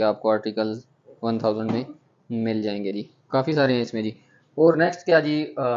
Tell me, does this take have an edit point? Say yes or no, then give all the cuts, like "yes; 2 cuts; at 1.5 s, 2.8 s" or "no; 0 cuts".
no; 0 cuts